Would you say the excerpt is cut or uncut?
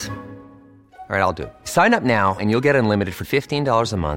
uncut